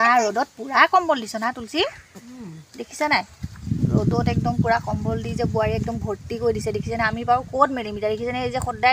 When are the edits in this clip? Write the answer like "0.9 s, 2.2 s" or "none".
none